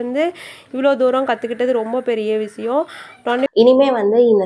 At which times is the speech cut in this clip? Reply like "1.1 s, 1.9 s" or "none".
3.5 s